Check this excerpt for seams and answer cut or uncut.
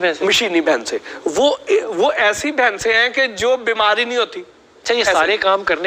cut